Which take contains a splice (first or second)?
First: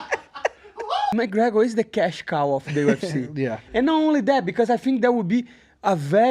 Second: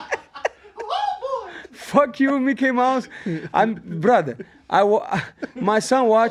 first